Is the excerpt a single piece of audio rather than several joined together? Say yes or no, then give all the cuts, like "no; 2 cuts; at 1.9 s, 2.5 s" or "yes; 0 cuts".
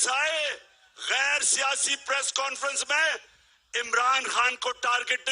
yes; 0 cuts